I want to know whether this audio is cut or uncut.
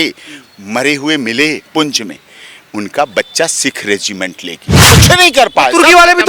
cut